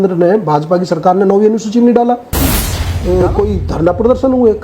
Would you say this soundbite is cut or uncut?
cut